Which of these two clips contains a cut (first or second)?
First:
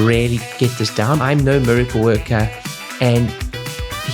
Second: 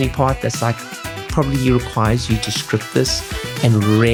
first